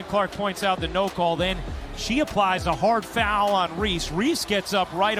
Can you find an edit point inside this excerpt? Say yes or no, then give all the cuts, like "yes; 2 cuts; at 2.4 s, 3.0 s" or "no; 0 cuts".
no; 0 cuts